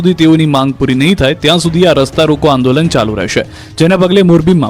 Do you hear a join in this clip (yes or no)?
yes